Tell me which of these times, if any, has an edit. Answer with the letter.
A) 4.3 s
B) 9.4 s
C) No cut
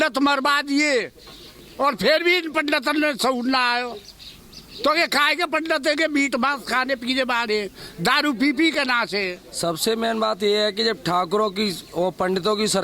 B